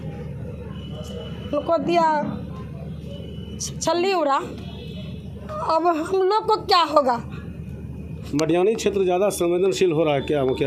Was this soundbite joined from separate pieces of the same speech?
no; 0 cuts

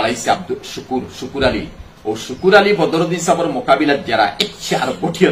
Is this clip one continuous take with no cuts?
yes; 0 cuts

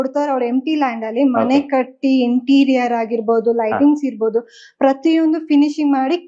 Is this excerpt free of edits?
yes; 0 cuts

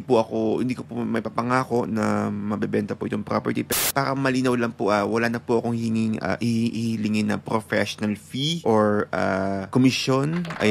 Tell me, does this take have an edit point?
yes; 3 cuts; at 3.8 s, 8.6 s, 9.6 s

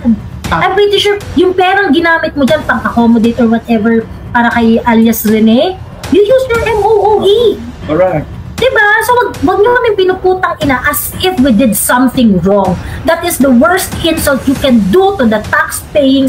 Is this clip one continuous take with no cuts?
yes; 0 cuts

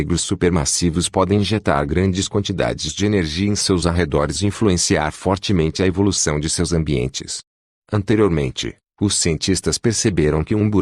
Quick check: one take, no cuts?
no; 1 cut; at 1.0 s

